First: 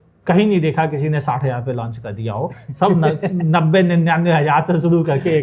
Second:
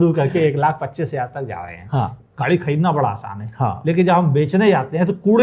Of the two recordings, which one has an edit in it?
second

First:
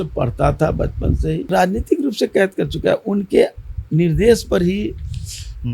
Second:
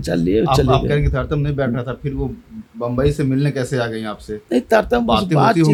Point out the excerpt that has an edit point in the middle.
first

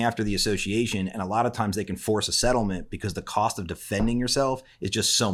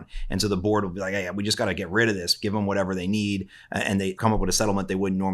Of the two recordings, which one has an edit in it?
second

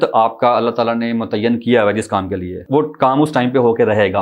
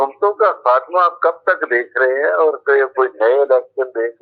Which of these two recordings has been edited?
first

